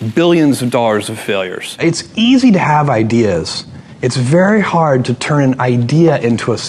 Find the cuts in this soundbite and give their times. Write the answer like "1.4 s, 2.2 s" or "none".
1.6 s